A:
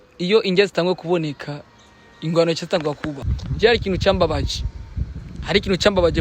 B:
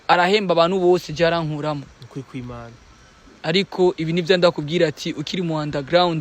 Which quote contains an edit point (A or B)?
A